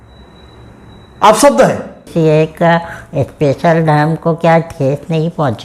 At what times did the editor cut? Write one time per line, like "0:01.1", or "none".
0:02.1